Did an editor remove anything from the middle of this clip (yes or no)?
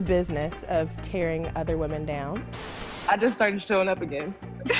yes